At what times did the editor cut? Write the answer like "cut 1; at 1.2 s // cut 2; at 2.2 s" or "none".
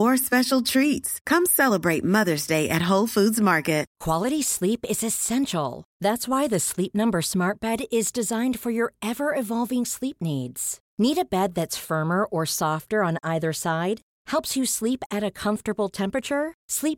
cut 1; at 3.9 s